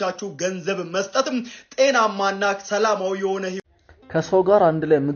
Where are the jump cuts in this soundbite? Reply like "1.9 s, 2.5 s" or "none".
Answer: 3.6 s

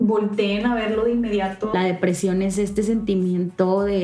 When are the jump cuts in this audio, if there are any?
1.7 s

